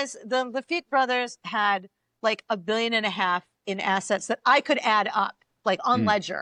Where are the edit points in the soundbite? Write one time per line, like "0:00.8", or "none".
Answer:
none